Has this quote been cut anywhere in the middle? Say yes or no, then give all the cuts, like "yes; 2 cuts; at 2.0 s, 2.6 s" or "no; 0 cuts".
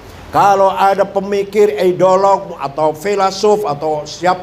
no; 0 cuts